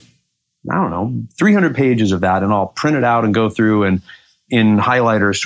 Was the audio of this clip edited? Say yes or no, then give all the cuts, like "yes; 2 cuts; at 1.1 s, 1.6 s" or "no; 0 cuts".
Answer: yes; 1 cut; at 4.5 s